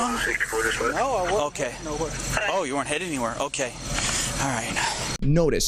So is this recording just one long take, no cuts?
yes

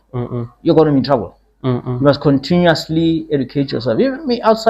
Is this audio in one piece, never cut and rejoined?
yes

